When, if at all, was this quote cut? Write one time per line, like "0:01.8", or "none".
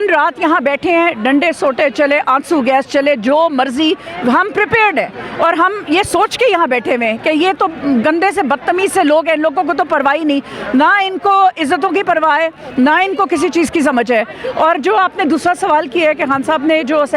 none